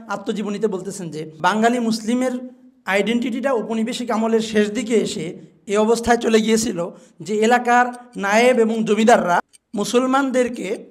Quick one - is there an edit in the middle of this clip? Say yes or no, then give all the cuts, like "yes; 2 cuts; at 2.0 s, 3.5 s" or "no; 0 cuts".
yes; 2 cuts; at 1.3 s, 9.6 s